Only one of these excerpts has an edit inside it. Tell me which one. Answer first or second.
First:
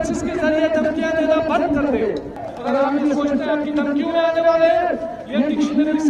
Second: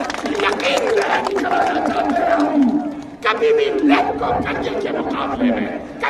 first